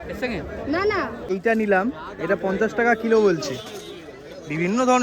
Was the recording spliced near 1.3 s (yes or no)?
yes